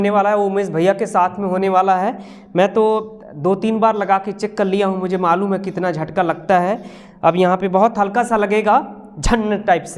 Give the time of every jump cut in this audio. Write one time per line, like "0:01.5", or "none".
none